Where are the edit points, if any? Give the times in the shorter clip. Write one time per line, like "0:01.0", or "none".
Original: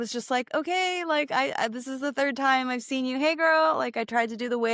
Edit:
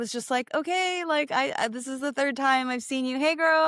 none